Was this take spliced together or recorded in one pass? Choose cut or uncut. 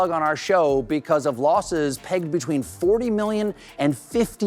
uncut